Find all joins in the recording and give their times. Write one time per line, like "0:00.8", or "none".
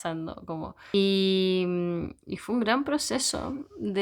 0:00.9

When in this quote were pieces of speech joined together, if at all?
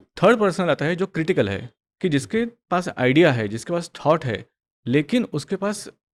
none

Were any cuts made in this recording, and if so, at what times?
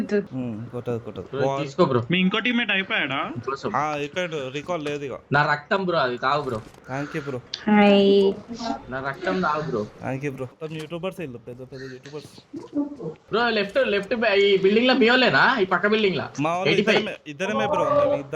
none

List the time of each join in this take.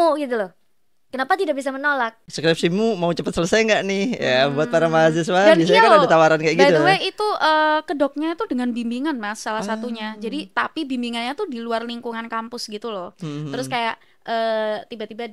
0:02.3

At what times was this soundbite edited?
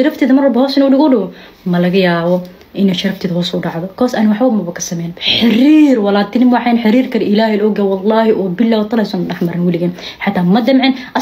none

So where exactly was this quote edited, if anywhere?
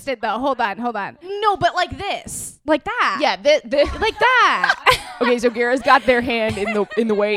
0:01.2

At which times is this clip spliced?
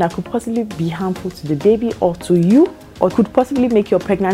0:03.1

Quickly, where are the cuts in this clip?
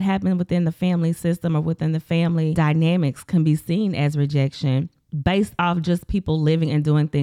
0:02.5
0:05.0

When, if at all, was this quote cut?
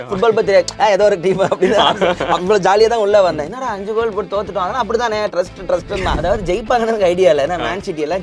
0:06.2

